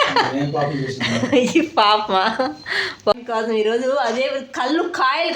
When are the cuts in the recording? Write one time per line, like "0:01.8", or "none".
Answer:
0:03.1